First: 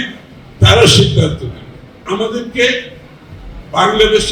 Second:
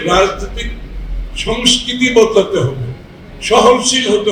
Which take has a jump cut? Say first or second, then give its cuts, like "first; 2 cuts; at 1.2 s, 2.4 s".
first; 1 cut; at 2.0 s